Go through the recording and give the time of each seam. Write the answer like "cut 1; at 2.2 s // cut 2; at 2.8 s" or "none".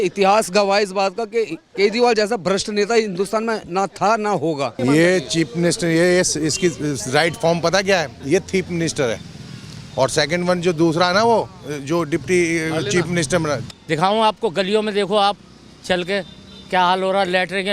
cut 1; at 4.8 s // cut 2; at 13.6 s